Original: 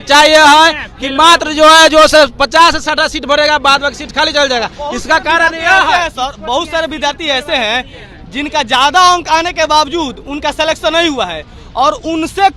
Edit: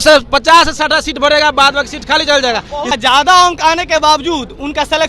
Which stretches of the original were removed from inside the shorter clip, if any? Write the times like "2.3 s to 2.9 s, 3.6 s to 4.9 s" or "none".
5.0 s to 8.6 s